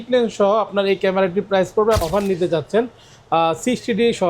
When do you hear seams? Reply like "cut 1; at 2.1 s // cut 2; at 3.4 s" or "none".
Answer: cut 1; at 2.0 s